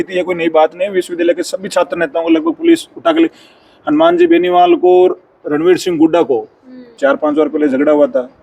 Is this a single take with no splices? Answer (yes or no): no